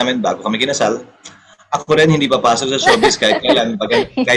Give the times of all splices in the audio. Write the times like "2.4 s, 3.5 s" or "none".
none